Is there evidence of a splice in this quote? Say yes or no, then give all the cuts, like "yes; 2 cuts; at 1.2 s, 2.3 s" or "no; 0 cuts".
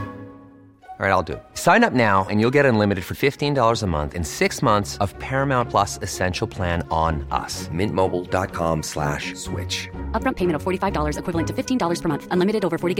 no; 0 cuts